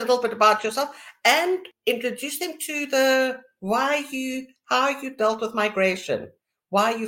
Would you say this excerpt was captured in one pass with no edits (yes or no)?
no